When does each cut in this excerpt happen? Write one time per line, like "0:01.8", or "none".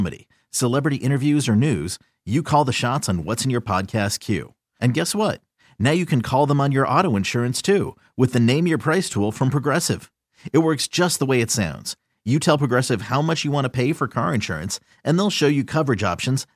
none